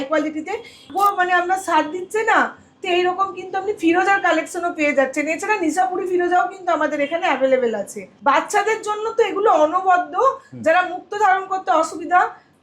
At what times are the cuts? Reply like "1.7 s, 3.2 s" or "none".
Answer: 0.9 s, 8.0 s